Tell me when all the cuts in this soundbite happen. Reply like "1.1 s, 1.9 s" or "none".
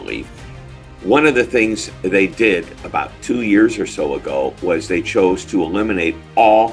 none